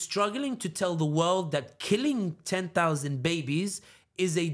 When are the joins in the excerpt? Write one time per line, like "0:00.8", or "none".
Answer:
none